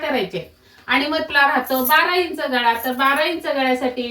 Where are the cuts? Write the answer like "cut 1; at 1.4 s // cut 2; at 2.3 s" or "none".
cut 1; at 1.3 s